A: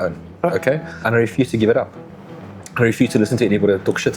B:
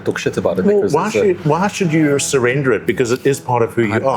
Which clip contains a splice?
A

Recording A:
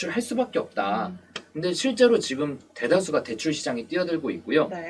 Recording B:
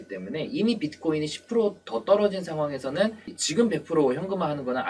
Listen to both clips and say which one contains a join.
B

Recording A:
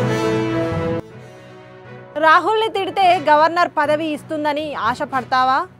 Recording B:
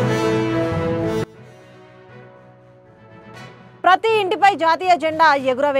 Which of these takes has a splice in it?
B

